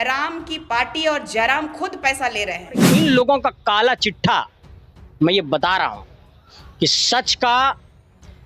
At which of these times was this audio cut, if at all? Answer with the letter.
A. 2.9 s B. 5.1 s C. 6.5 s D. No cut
A